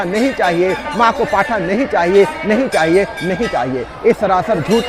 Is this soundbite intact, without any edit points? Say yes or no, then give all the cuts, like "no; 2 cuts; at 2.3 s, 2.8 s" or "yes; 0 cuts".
yes; 0 cuts